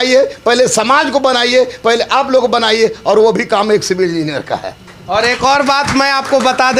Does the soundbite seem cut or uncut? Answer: uncut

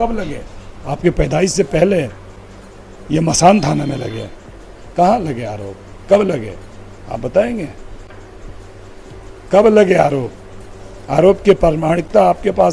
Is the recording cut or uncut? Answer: uncut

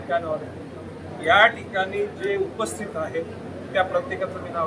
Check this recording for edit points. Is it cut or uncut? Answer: uncut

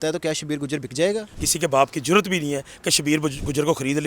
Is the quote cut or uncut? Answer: cut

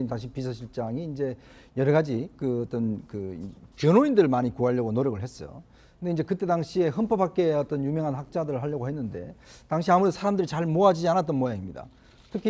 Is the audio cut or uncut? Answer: uncut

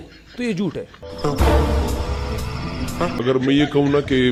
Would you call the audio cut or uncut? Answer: uncut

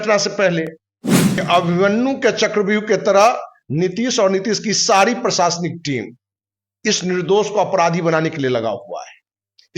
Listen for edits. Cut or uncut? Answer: cut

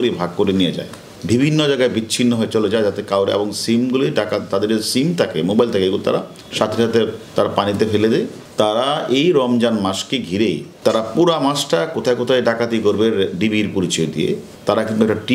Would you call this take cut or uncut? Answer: uncut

